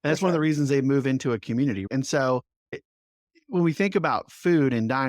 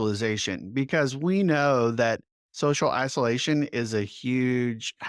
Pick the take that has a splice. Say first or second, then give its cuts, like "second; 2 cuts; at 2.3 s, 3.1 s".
first; 2 cuts; at 1.9 s, 2.8 s